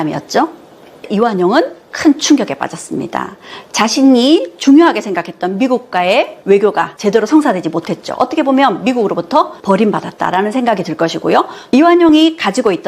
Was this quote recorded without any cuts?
no; 2 cuts; at 1.1 s, 11.6 s

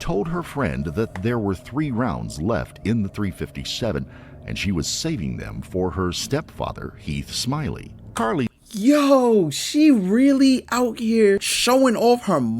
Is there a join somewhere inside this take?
yes; 1 cut; at 11.5 s

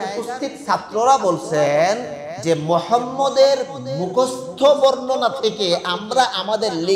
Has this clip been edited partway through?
no; 0 cuts

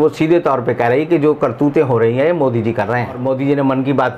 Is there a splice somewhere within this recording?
yes; 1 cut; at 3.2 s

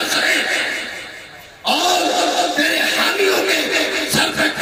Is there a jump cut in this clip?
no; 0 cuts

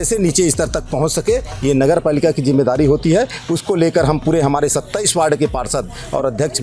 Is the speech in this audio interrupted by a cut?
no; 0 cuts

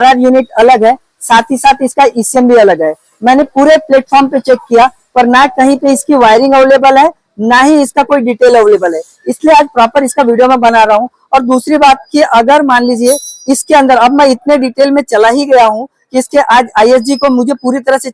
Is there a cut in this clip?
no; 0 cuts

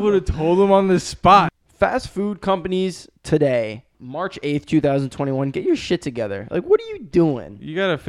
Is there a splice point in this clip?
yes; 1 cut; at 1.5 s

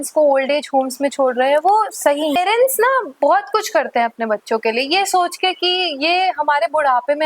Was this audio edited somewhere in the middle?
yes; 1 cut; at 2.4 s

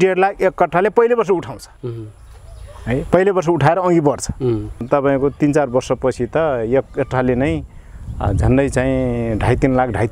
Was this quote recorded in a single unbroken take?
no; 1 cut; at 4.8 s

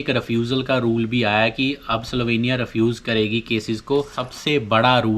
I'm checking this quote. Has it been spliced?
yes; 1 cut; at 4.2 s

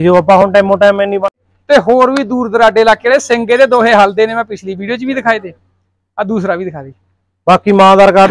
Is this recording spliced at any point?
yes; 1 cut; at 1.3 s

